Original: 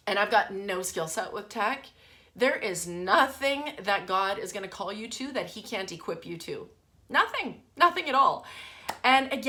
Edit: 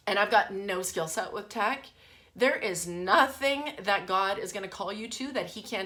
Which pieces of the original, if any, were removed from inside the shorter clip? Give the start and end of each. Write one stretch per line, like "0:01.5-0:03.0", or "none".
none